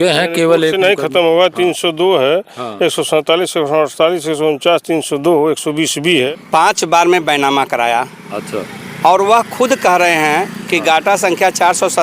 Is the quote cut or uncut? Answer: cut